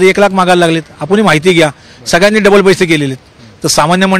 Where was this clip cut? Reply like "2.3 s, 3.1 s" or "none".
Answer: none